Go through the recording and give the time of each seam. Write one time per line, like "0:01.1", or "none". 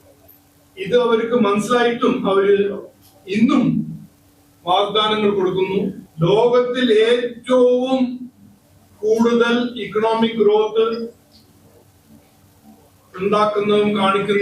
0:06.0